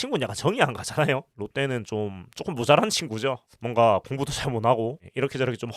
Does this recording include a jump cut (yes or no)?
yes